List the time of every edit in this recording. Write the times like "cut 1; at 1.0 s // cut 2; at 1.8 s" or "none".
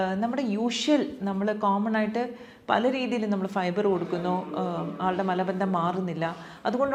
none